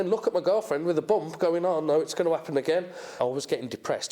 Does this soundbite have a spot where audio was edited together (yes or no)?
yes